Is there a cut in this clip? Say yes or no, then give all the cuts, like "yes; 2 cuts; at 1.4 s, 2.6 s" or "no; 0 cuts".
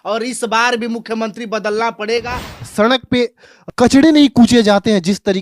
yes; 2 cuts; at 2.6 s, 3.6 s